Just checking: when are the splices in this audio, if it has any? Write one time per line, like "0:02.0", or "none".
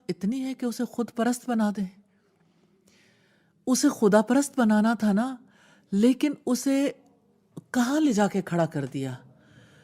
none

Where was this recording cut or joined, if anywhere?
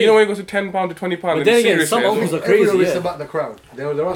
none

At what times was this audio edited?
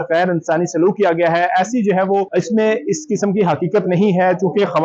0:02.3

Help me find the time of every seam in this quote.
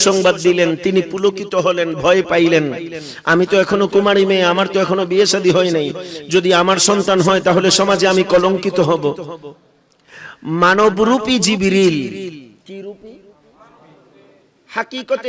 none

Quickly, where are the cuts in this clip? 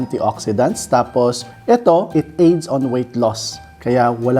0:01.4

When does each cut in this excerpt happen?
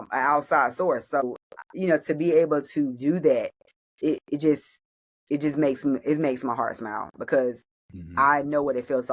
0:01.2

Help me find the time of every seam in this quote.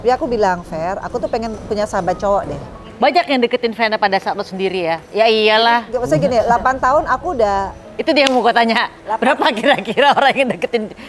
0:02.8

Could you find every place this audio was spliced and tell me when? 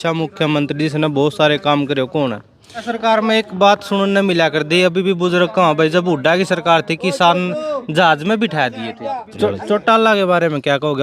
0:02.9
0:09.3

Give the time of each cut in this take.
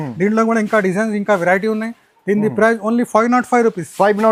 none

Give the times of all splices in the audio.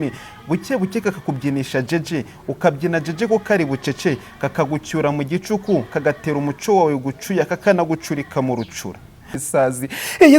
0:09.4

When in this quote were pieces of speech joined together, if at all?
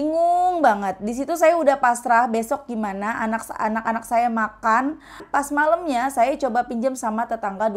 0:05.2

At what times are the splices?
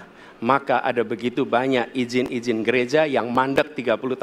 none

